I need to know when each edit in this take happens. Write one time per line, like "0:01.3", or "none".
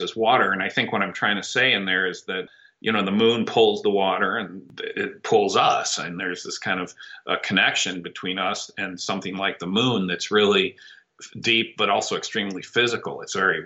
none